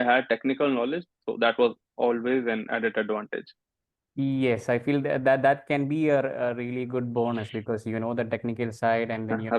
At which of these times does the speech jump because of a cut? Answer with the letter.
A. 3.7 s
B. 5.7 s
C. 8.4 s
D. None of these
D